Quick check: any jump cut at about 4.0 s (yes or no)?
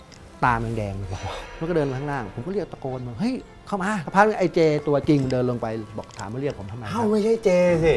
yes